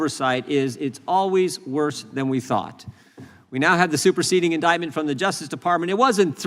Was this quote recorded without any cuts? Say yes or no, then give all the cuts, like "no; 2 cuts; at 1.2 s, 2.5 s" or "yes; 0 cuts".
yes; 0 cuts